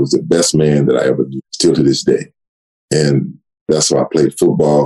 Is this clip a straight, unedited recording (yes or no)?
no